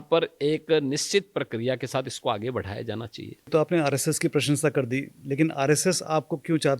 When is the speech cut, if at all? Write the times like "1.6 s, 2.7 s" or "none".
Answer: 3.5 s